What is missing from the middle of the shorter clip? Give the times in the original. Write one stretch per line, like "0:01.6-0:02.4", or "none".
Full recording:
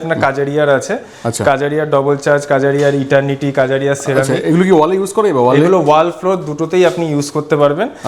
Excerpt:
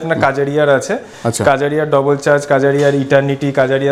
none